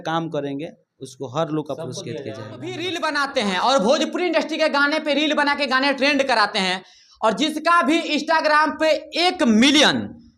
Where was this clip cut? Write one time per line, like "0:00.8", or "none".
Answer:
0:02.8